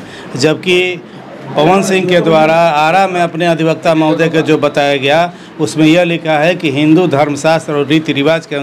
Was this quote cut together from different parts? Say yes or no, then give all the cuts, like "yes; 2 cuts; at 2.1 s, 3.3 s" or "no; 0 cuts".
no; 0 cuts